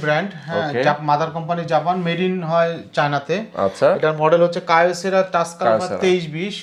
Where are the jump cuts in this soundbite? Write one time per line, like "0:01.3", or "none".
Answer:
none